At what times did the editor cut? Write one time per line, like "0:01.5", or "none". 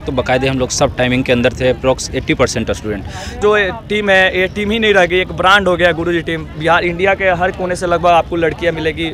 0:03.4